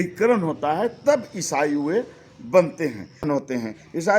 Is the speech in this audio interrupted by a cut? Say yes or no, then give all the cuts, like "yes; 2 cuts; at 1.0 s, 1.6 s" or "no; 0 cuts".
yes; 1 cut; at 3.2 s